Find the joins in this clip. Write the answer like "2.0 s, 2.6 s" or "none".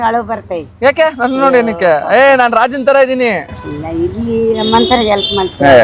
none